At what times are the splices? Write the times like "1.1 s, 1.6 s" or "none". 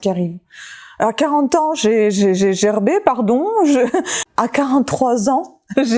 4.2 s